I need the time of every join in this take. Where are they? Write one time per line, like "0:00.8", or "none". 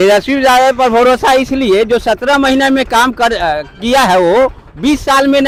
none